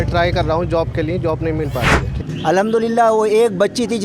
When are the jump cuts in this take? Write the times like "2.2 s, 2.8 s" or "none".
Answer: 2.1 s